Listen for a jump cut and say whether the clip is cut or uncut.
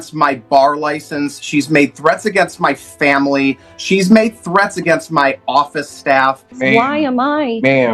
cut